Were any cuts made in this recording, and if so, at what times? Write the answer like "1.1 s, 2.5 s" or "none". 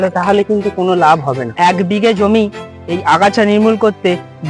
1.5 s